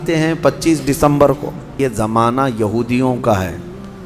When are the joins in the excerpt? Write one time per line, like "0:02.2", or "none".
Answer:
0:01.7